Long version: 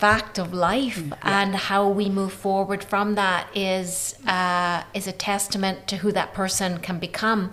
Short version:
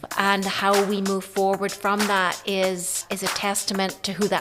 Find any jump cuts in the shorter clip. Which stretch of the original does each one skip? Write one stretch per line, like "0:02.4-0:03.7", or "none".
0:04.1-0:04.9